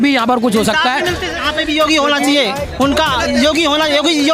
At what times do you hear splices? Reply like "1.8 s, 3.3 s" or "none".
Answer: 1.3 s